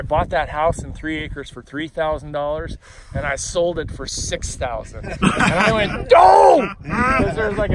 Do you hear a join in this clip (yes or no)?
no